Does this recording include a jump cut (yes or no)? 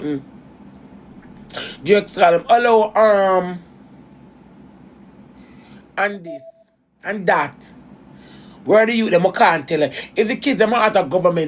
no